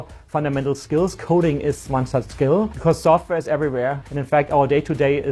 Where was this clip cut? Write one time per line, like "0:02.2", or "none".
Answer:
0:02.7
0:04.1